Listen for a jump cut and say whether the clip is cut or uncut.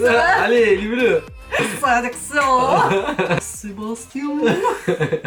cut